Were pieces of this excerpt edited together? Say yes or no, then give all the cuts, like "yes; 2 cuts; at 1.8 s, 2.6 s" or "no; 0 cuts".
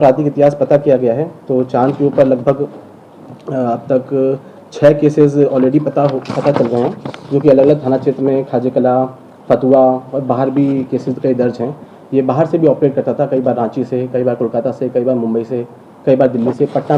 no; 0 cuts